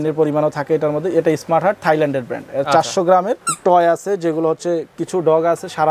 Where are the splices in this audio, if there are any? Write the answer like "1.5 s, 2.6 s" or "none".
3.4 s